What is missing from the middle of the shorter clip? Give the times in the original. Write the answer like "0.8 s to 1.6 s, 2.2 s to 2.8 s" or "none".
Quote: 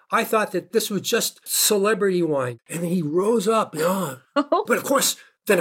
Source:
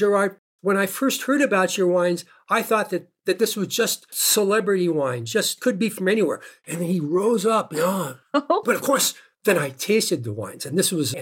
3.1 s to 3.4 s, 5.2 s to 6.5 s